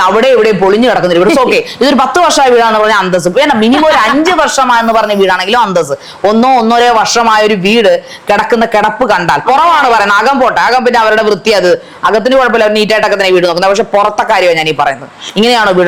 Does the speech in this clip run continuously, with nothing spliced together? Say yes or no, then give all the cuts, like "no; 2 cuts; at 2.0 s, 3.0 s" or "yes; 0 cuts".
yes; 0 cuts